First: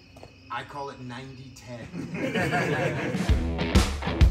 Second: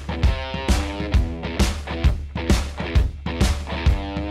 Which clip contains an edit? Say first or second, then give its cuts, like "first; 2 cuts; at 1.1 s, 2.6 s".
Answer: first; 1 cut; at 3.2 s